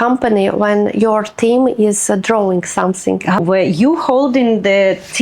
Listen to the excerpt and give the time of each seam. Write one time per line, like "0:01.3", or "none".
0:03.4